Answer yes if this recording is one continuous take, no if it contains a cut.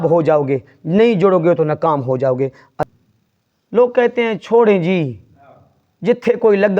no